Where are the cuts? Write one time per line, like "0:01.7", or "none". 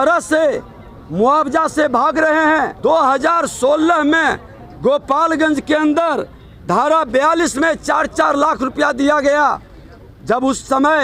0:02.7